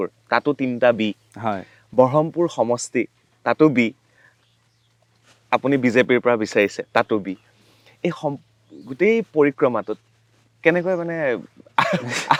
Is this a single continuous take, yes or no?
yes